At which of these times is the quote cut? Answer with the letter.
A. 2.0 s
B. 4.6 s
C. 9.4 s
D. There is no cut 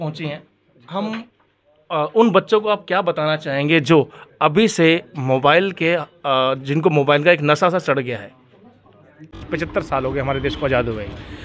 C